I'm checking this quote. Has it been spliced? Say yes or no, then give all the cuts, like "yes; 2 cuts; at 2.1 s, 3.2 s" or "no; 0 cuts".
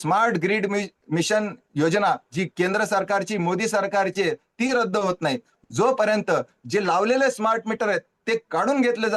no; 0 cuts